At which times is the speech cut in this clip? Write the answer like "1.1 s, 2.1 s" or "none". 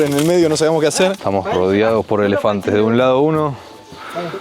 1.2 s